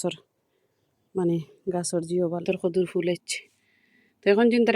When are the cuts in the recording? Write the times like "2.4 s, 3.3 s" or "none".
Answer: 2.5 s